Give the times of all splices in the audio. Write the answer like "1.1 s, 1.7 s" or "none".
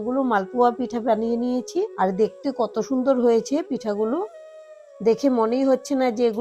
1.9 s